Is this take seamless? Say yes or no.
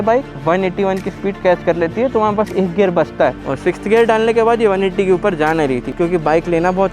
no